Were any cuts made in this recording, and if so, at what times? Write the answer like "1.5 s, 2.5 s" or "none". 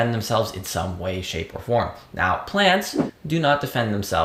none